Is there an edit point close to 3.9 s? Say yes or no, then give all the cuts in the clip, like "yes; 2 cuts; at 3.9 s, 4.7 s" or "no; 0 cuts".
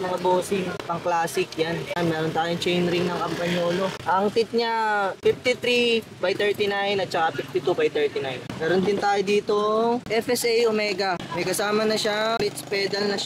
no; 0 cuts